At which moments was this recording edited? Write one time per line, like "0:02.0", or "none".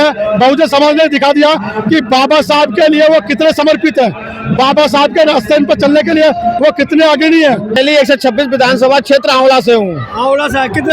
0:07.8